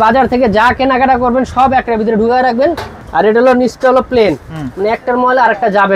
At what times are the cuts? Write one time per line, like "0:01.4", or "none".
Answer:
0:02.9